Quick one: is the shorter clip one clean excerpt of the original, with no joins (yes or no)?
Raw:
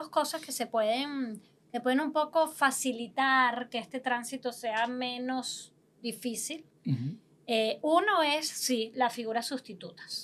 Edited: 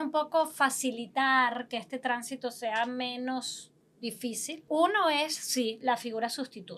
no